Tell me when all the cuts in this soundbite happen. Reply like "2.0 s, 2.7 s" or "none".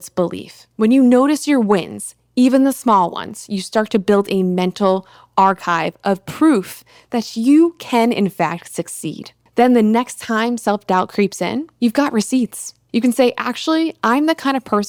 none